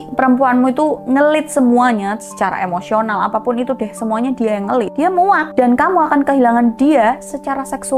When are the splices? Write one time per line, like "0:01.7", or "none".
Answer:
none

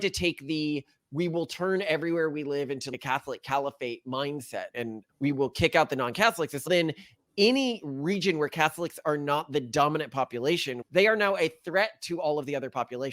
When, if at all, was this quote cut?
0:04.7
0:10.8

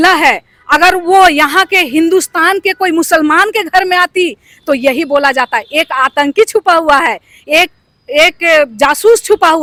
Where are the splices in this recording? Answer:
none

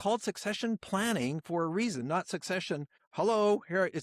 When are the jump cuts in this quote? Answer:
0:03.0

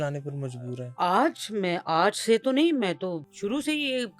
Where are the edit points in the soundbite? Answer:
0:03.3

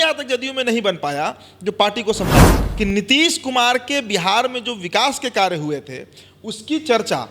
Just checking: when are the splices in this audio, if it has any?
0:02.6

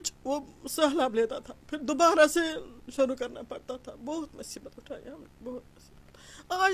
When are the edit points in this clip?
none

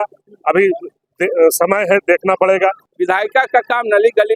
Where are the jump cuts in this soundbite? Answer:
0:02.9

